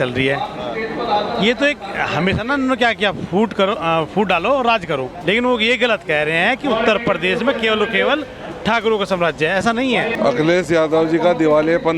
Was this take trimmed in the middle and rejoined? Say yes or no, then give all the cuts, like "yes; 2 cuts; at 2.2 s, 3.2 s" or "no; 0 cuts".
yes; 2 cuts; at 5.1 s, 10.1 s